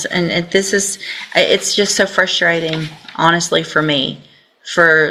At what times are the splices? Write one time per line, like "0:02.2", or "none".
none